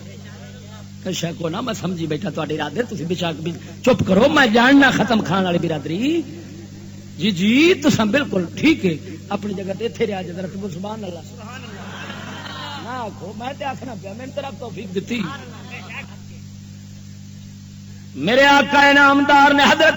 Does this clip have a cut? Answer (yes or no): yes